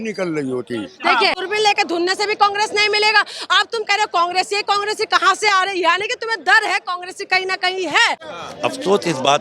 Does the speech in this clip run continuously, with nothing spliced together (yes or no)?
no